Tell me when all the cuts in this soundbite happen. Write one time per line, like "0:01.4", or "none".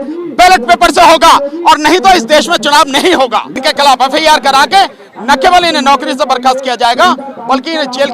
0:03.5